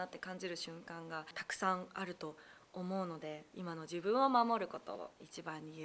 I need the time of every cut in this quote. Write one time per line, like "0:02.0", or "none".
0:03.5